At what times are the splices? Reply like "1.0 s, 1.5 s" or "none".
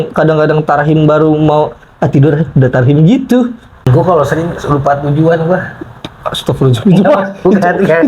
3.9 s